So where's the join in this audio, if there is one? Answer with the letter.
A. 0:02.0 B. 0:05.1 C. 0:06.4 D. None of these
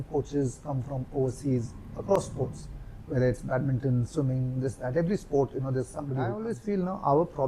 C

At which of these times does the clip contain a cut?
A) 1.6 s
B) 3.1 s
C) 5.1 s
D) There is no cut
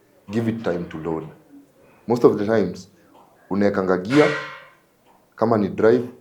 D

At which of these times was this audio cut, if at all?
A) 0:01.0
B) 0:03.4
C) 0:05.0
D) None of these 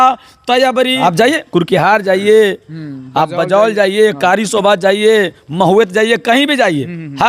A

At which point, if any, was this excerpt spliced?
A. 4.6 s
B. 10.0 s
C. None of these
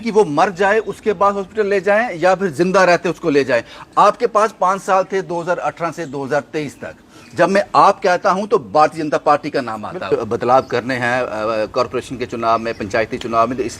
B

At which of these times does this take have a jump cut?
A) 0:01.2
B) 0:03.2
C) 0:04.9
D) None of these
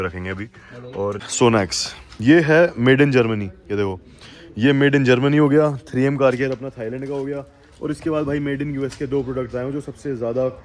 A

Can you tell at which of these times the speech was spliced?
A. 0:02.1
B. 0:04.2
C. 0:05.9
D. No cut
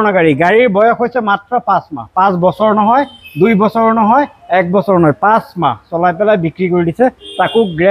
D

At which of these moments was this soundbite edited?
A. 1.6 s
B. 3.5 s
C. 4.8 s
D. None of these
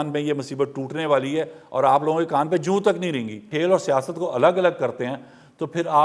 B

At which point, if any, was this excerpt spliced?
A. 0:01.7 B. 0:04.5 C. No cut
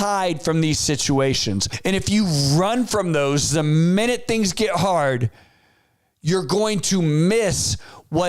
A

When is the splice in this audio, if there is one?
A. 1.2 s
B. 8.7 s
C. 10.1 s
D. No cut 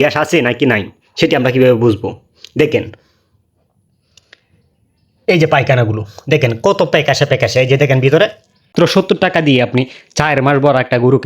B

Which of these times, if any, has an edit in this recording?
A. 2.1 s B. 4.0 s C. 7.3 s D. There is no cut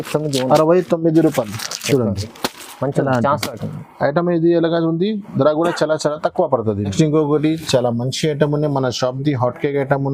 D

